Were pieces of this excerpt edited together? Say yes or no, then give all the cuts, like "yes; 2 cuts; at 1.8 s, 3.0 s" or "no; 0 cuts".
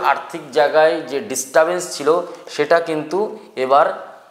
no; 0 cuts